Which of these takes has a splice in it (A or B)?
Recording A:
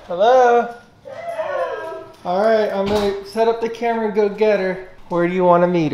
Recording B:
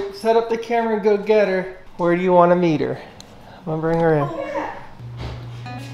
B